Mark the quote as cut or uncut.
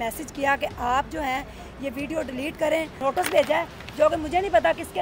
cut